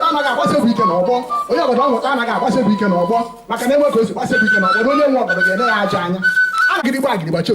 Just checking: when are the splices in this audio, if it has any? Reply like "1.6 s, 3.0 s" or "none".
none